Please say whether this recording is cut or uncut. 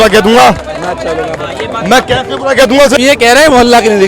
cut